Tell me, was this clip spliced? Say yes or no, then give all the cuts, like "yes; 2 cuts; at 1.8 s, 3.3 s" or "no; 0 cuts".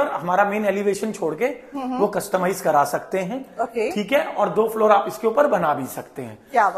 no; 0 cuts